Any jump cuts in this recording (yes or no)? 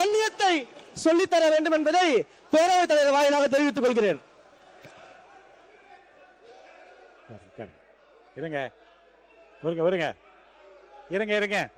no